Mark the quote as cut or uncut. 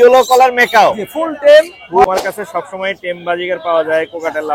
cut